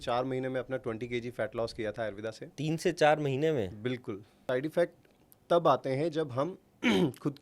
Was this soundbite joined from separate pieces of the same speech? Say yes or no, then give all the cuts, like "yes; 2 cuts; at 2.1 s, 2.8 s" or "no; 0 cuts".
yes; 1 cut; at 4.3 s